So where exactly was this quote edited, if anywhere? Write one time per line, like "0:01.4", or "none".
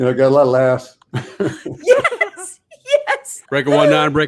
0:03.3